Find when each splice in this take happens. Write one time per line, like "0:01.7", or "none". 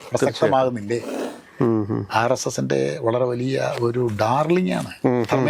0:01.1